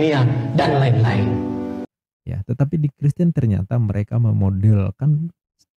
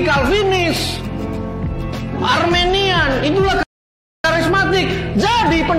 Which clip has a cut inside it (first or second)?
first